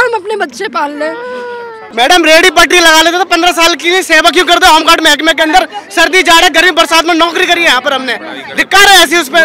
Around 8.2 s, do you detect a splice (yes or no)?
no